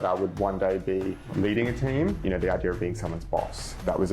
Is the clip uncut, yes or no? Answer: no